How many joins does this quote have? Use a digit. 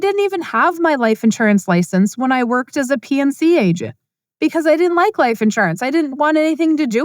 1